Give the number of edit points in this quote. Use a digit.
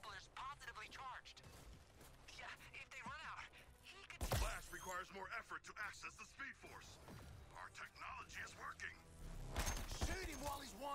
0